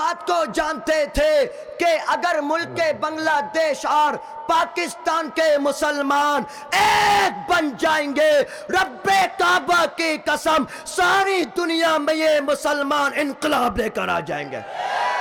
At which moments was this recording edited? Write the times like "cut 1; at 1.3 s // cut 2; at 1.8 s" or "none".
none

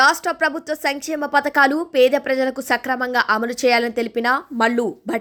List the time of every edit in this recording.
none

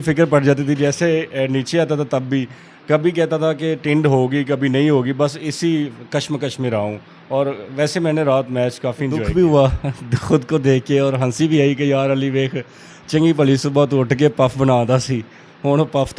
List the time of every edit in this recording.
cut 1; at 9.2 s

